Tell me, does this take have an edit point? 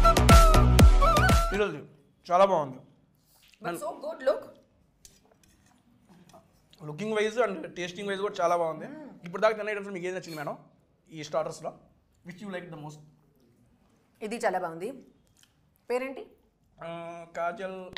no; 0 cuts

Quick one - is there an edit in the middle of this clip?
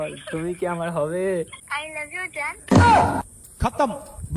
yes; 1 cut; at 1.6 s

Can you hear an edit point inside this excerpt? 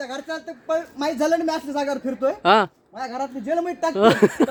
no; 0 cuts

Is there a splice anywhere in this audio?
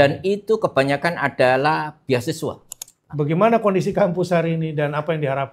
yes; 1 cut; at 2.7 s

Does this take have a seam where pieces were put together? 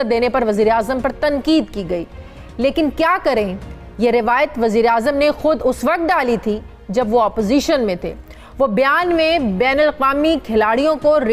no; 0 cuts

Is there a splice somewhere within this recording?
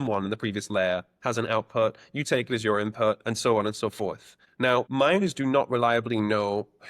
yes; 1 cut; at 4.7 s

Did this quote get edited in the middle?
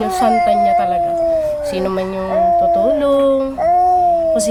no; 0 cuts

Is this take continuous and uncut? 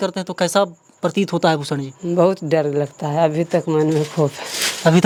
yes; 0 cuts

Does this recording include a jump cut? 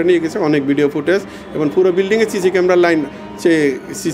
no; 0 cuts

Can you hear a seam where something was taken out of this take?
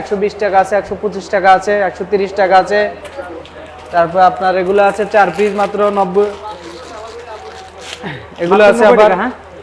no; 0 cuts

